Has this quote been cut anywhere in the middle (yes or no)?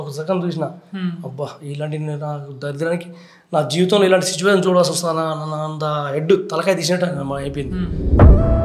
no